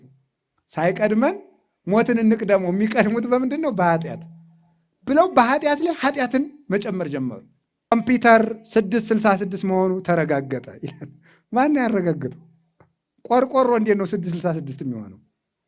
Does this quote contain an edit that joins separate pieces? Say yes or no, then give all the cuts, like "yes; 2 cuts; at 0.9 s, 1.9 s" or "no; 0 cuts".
yes; 1 cut; at 7.9 s